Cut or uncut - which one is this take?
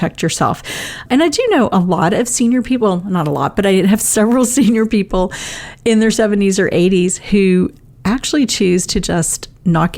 cut